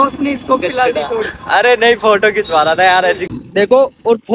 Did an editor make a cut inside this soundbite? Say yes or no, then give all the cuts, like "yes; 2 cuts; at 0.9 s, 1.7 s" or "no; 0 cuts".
yes; 1 cut; at 3.2 s